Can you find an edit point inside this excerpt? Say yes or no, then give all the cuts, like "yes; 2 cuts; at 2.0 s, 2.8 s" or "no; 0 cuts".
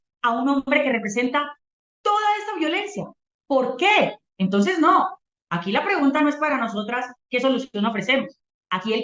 no; 0 cuts